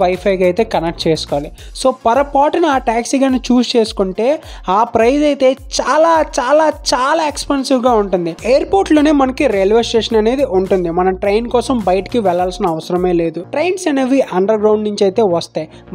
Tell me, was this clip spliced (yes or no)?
yes